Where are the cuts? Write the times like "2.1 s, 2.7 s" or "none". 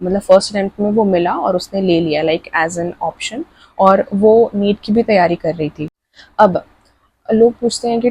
5.9 s